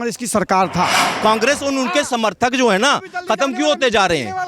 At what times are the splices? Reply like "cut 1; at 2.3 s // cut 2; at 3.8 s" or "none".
cut 1; at 1.2 s